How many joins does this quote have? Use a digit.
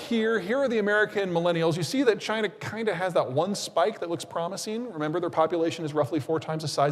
0